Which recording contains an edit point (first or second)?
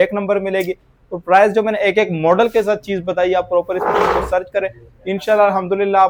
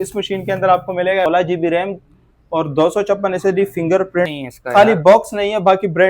second